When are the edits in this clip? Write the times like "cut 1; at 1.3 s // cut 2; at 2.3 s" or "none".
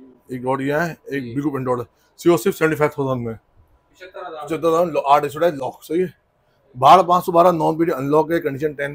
none